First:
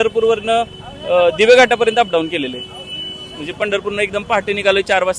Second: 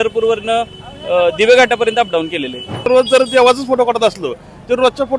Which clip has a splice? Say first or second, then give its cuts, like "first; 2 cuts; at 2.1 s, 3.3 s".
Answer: second; 1 cut; at 2.9 s